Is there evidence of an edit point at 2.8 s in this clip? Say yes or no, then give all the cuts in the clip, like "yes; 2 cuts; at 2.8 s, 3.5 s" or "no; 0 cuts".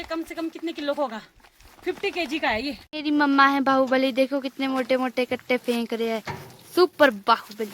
yes; 1 cut; at 2.8 s